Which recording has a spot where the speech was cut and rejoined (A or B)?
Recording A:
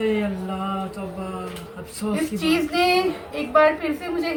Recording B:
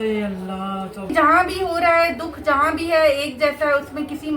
B